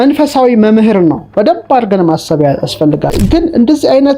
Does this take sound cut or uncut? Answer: cut